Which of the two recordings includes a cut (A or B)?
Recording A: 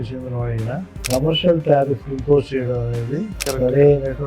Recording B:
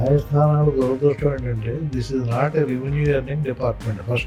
A